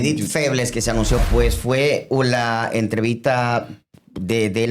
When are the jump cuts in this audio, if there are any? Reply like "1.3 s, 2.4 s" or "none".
1.2 s